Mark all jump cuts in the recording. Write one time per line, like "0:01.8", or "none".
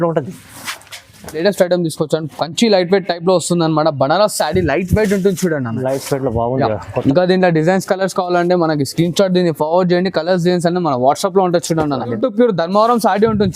0:01.4
0:07.0
0:12.1